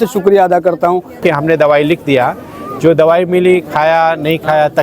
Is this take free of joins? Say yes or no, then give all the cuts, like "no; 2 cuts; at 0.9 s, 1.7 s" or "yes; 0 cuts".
no; 1 cut; at 1.2 s